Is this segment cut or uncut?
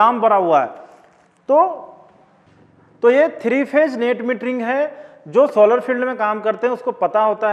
cut